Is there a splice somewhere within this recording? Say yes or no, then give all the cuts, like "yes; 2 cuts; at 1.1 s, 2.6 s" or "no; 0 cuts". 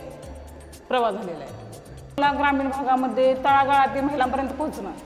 yes; 1 cut; at 2.2 s